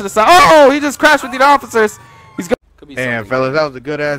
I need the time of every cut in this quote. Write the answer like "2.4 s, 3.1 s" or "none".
2.5 s